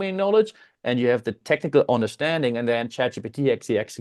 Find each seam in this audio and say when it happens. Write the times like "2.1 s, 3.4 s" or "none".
none